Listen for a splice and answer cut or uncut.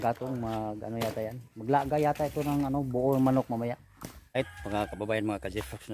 cut